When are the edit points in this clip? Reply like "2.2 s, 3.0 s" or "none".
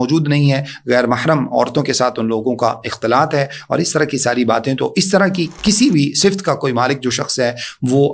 5.5 s

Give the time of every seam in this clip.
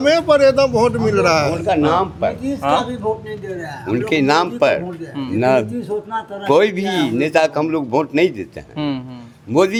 none

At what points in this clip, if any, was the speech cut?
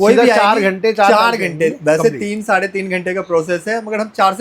none

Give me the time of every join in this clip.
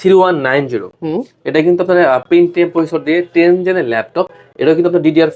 none

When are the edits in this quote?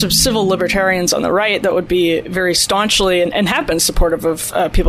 none

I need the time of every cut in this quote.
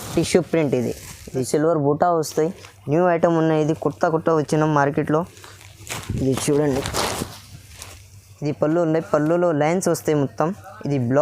1.5 s

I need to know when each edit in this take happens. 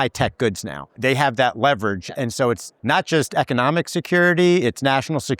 0.9 s, 2.7 s

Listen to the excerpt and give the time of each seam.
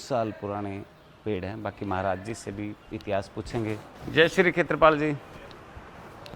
none

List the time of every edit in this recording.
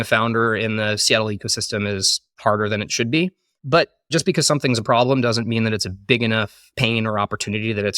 3.7 s, 6.6 s

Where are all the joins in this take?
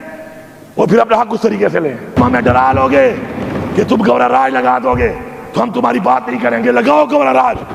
2.2 s

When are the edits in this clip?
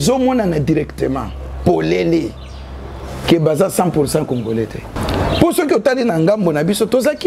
5.0 s

